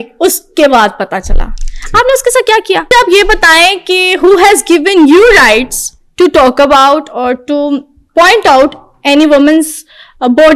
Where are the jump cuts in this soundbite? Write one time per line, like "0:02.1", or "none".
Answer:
0:02.9